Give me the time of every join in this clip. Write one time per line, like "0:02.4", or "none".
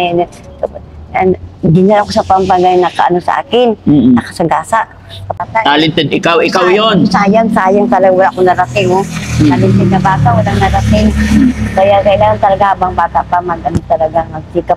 0:05.5